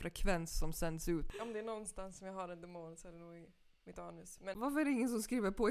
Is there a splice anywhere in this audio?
yes; 2 cuts; at 1.2 s, 4.5 s

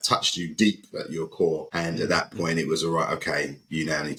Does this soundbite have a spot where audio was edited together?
no; 0 cuts

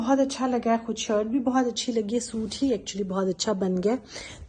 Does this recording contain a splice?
no; 0 cuts

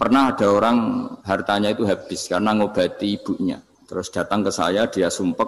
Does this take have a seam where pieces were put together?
yes; 2 cuts; at 1.2 s, 3.7 s

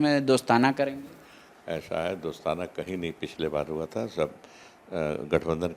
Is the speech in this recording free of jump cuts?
yes; 0 cuts

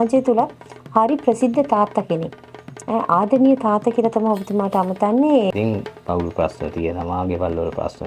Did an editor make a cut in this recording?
yes; 1 cut; at 5.6 s

